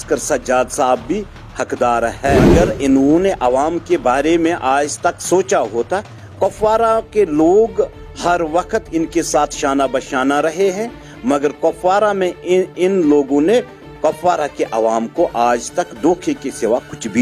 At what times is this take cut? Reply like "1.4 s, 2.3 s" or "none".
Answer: 2.5 s

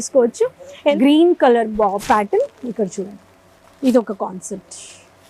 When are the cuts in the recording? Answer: 0.9 s

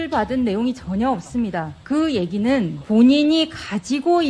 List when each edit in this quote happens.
1.7 s, 2.8 s

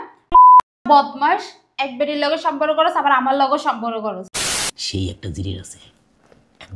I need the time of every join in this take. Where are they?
4.3 s

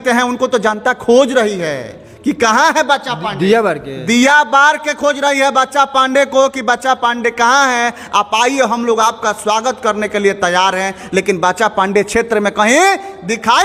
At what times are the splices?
none

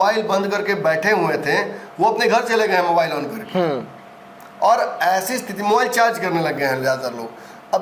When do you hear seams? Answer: none

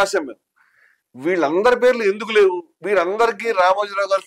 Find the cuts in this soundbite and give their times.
none

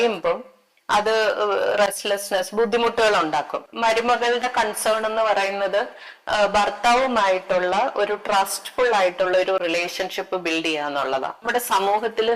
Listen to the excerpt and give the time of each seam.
3.7 s, 11.5 s

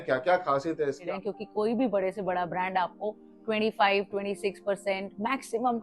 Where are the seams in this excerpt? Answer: 1.0 s

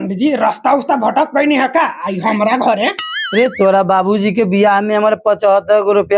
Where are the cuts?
none

